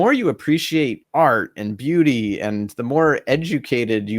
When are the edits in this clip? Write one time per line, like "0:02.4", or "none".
0:01.0

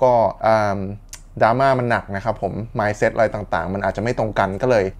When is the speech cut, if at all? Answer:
none

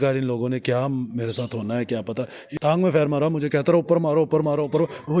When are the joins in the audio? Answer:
0:02.5

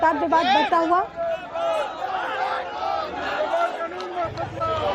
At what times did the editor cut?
0:02.0

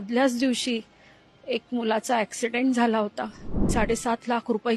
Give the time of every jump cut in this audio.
0:03.7

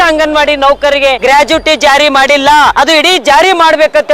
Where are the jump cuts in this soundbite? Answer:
0:01.2
0:02.7

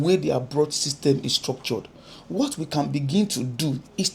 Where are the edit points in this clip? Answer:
none

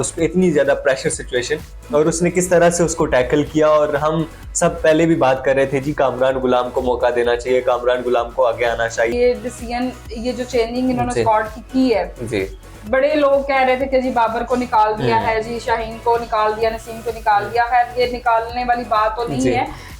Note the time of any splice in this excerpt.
0:09.1

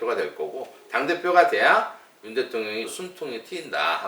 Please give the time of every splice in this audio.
0:02.9

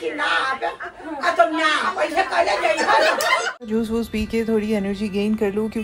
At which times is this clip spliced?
0:03.7

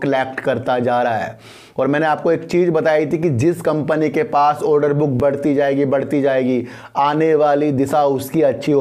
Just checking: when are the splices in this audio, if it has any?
none

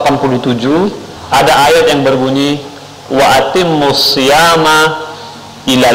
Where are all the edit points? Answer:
none

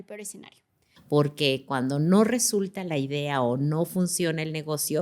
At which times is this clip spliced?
0:00.9

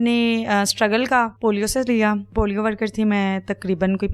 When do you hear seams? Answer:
0:01.3
0:02.3

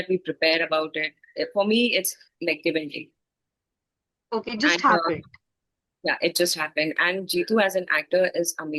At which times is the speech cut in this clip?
none

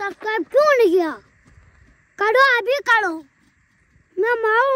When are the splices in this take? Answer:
none

